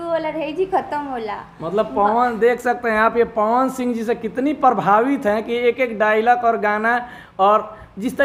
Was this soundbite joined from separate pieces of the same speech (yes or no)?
no